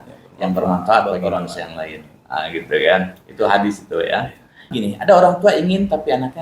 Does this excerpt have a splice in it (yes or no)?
yes